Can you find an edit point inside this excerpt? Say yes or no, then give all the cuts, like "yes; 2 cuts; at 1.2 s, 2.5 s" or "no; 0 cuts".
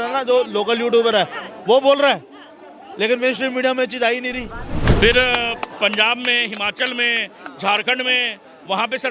yes; 1 cut; at 4.9 s